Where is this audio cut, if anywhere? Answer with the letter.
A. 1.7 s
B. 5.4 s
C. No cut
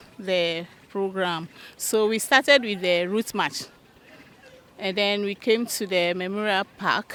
C